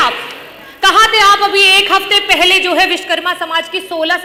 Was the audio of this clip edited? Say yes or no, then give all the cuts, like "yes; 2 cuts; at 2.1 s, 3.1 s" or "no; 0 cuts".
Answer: no; 0 cuts